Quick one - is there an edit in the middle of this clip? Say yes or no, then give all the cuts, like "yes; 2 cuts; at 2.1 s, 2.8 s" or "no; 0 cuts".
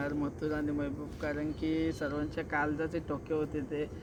no; 0 cuts